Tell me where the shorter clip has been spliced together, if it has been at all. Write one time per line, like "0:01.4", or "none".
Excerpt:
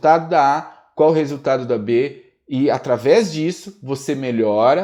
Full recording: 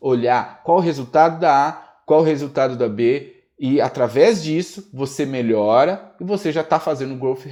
none